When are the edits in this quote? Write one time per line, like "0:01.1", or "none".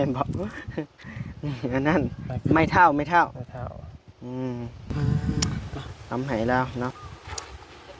0:06.9